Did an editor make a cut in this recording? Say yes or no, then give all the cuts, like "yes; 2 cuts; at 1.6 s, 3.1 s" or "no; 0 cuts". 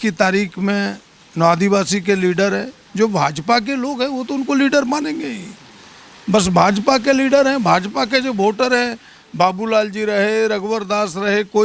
no; 0 cuts